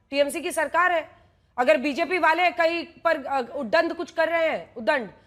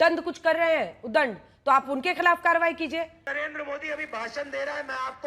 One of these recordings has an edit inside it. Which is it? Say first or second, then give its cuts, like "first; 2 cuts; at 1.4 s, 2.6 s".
second; 1 cut; at 3.2 s